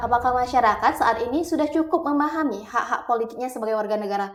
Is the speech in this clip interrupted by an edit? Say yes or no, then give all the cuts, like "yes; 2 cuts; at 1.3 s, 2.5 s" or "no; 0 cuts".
no; 0 cuts